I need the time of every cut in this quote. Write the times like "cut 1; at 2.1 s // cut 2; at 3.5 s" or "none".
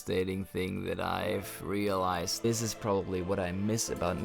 cut 1; at 2.4 s